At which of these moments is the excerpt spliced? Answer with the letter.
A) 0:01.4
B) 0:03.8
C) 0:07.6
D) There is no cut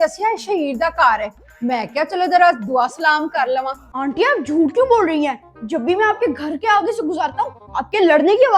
B